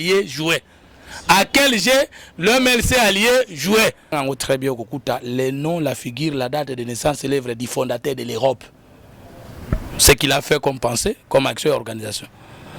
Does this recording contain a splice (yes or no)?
yes